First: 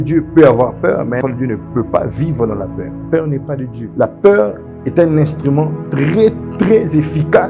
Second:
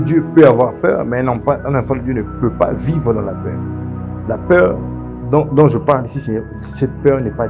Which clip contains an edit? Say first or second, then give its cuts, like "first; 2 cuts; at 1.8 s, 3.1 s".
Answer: first; 3 cuts; at 1.2 s, 2.9 s, 3.8 s